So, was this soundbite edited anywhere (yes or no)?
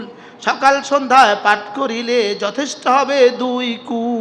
no